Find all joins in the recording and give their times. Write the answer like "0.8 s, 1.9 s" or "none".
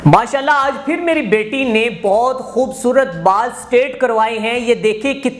none